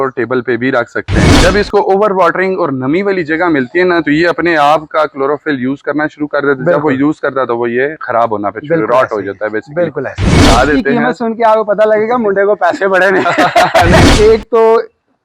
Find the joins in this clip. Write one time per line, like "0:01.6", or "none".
0:01.3
0:10.4
0:14.1